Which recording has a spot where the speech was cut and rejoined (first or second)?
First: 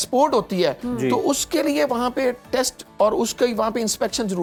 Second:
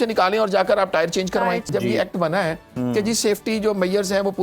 second